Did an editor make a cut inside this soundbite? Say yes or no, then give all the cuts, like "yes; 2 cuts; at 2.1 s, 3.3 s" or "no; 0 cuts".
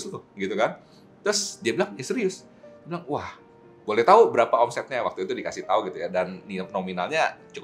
no; 0 cuts